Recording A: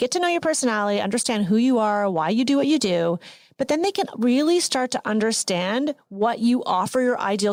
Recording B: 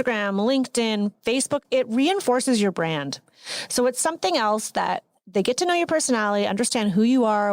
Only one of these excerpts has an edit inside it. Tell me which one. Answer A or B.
B